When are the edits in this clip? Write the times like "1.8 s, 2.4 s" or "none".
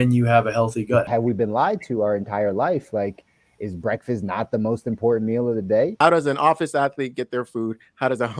1.1 s, 5.9 s